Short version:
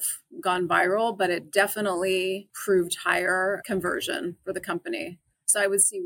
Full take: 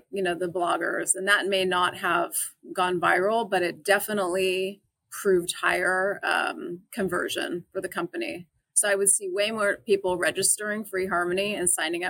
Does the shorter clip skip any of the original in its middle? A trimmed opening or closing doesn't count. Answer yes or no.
yes